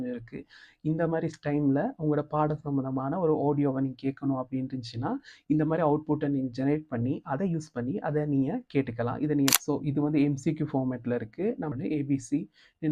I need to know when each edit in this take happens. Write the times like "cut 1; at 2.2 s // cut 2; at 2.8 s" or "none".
cut 1; at 9.5 s // cut 2; at 11.7 s

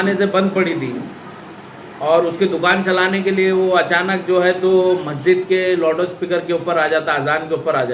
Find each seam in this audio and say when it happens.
none

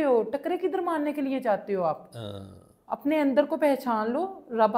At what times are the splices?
none

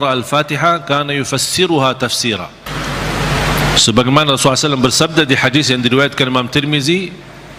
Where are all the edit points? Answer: cut 1; at 2.6 s

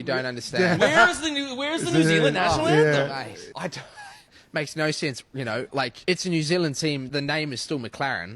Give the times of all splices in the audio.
cut 1; at 3.1 s // cut 2; at 6.0 s

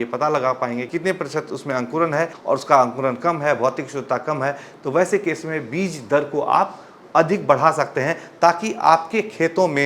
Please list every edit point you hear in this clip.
cut 1; at 0.9 s // cut 2; at 2.4 s

